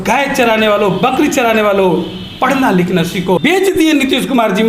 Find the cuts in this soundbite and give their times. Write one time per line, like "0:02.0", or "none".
0:03.4

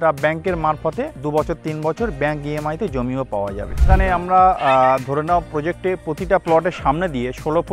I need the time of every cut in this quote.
0:01.2
0:03.8

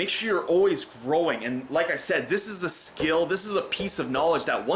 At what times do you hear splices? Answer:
none

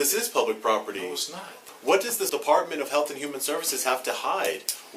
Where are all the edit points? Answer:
0:01.7
0:02.3

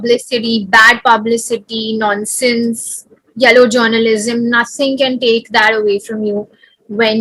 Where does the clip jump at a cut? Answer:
none

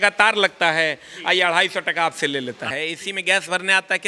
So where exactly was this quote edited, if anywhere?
0:02.7

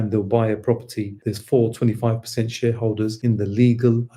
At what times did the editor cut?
0:01.2

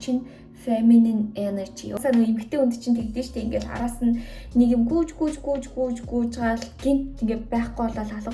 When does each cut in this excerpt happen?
0:02.0

